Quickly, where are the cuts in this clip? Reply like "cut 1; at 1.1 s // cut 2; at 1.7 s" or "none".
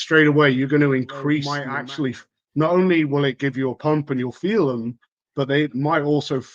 cut 1; at 1.6 s